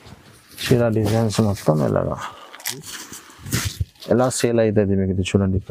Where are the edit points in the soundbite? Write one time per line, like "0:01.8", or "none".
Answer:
0:03.0